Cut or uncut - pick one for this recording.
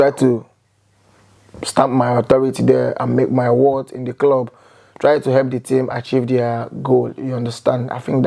uncut